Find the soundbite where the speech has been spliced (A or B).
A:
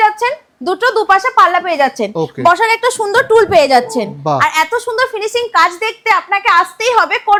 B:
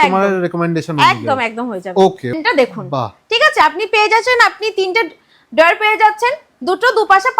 B